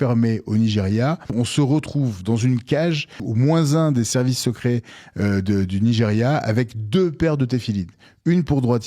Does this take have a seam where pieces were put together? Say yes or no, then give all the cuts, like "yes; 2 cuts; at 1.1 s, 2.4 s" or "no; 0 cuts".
yes; 2 cuts; at 1.3 s, 3.2 s